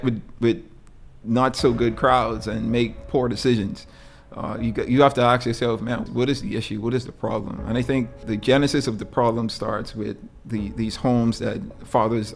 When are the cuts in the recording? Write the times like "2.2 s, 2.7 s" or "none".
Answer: 6.0 s, 8.2 s